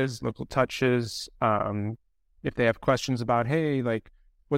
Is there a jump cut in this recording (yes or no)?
no